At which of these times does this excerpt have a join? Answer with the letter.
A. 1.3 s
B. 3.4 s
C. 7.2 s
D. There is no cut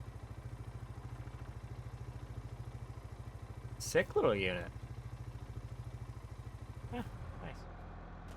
C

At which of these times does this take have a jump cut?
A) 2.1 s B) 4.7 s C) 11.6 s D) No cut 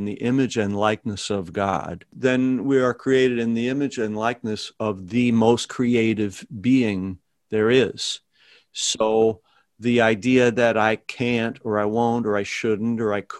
A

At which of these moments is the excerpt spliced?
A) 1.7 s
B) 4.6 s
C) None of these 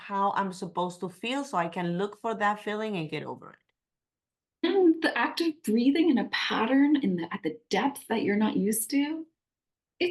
B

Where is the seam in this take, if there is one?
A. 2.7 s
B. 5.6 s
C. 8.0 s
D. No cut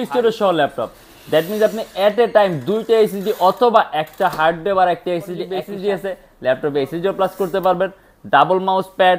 B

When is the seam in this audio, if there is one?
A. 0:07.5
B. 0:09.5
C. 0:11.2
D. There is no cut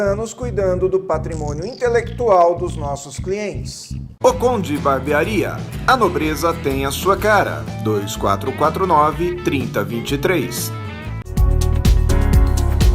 C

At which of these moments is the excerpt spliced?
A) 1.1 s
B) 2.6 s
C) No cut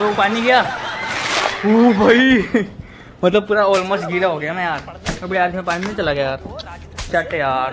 C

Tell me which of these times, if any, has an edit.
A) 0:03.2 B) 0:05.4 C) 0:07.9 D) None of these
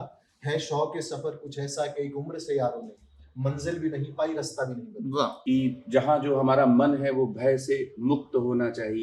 B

